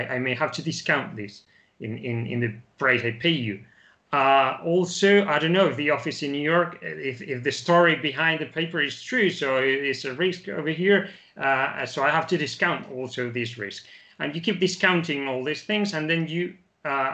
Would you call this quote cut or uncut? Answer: uncut